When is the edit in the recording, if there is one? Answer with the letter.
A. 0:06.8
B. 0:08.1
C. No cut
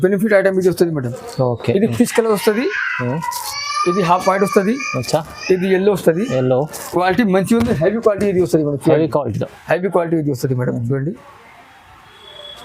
A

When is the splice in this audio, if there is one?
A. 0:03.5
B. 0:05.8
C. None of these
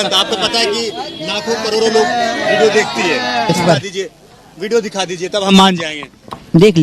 A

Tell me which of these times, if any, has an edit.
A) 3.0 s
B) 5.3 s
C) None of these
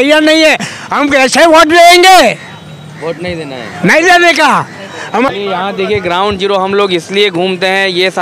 B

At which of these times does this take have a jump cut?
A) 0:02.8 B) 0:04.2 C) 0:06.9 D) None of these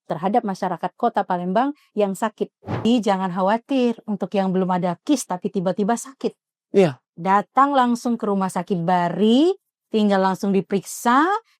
A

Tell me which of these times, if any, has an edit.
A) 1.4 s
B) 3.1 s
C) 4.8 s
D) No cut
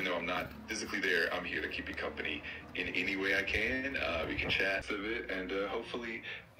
C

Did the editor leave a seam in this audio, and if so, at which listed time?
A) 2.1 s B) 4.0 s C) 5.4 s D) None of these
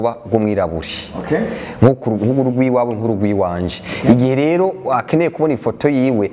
D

